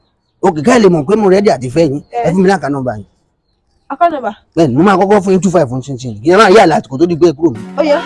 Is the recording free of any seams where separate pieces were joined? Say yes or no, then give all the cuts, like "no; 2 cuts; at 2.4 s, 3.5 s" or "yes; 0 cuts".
yes; 0 cuts